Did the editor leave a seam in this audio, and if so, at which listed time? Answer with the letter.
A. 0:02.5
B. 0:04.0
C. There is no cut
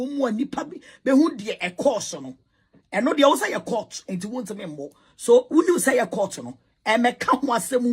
C